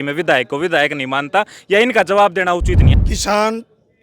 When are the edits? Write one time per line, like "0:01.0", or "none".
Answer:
0:02.9